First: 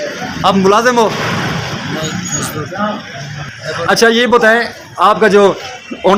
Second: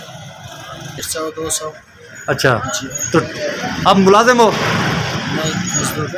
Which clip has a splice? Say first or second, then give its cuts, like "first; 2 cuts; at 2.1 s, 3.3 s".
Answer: second; 1 cut; at 1.1 s